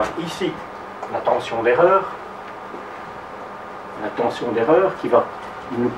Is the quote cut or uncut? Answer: uncut